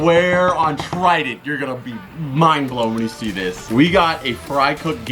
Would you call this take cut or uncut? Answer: cut